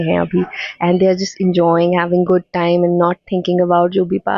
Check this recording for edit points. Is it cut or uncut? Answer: uncut